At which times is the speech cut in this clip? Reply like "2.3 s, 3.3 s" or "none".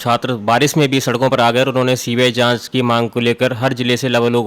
none

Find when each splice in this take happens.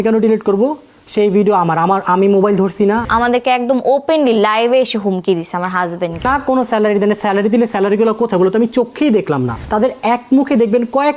3.1 s, 6.3 s, 9.6 s

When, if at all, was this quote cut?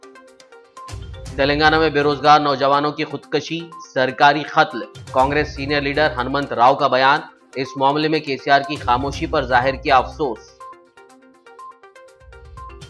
0.9 s

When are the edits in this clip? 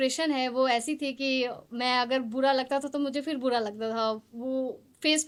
none

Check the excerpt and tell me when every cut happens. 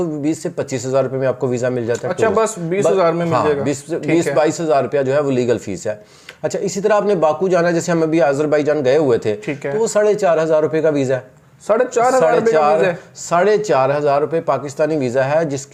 none

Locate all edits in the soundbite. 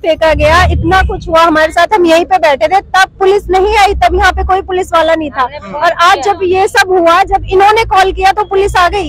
none

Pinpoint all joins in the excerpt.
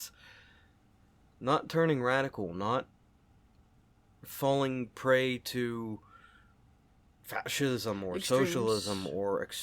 1.2 s

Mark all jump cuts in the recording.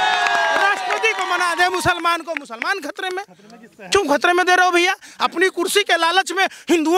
none

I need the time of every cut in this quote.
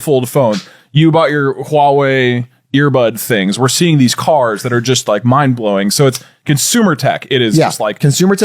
none

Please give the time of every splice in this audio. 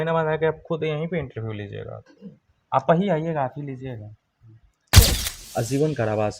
4.9 s

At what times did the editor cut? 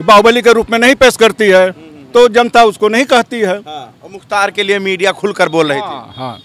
none

